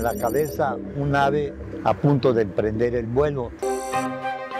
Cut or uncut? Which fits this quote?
cut